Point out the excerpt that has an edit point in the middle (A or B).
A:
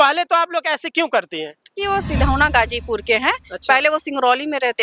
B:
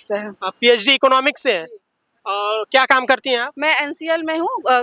A